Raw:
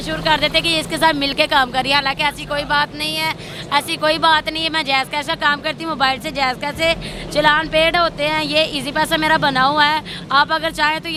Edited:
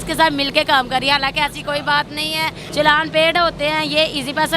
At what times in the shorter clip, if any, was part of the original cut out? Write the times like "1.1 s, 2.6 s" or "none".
2.6 s

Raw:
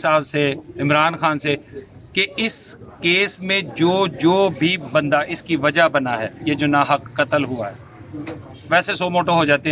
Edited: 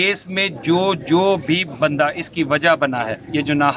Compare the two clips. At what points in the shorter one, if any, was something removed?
none

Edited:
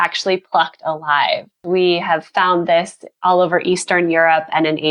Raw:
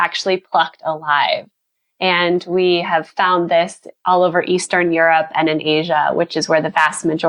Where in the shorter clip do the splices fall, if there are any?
1.6 s

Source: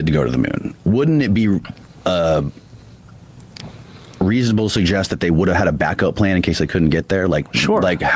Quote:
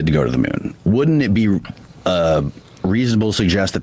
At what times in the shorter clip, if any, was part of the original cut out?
2.6 s

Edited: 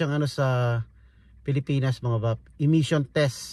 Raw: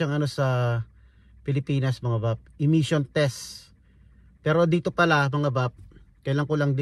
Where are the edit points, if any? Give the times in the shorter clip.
none

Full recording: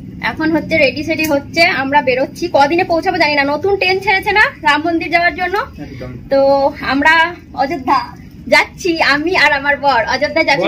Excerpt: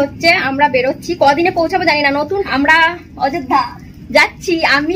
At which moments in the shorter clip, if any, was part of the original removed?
2.5 s

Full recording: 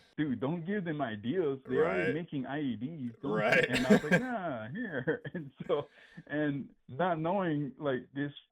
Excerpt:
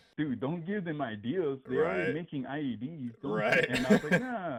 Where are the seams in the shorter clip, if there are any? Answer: none

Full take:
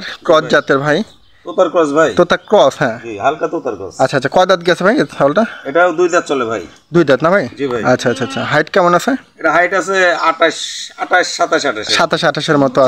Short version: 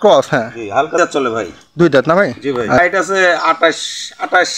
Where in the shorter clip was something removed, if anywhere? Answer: 1.0 s, 2.8 s

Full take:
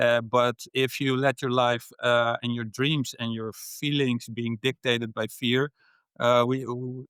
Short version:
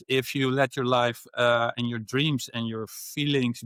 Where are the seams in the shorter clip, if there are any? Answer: none

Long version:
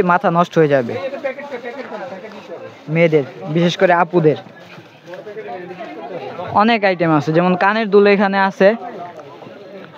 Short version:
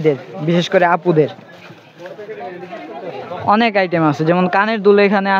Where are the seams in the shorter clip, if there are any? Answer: none

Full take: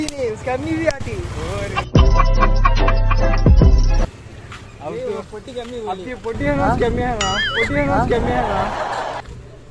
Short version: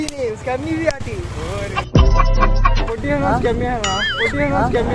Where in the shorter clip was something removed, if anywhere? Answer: 2.8 s

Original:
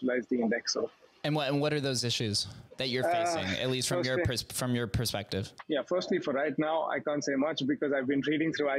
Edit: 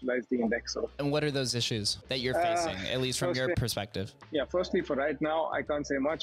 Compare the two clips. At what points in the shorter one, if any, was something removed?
1.0 s, 2.0 s, 3.6 s

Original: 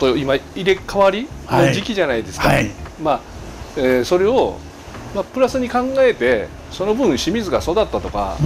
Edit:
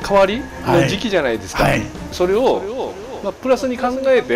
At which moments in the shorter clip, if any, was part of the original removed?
2.1 s

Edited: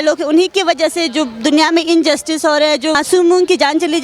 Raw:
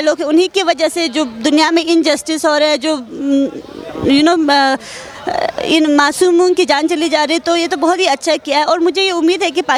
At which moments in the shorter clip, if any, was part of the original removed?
3.0 s

